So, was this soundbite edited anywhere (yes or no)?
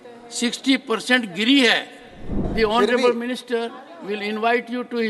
yes